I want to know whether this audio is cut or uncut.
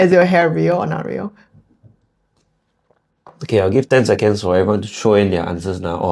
uncut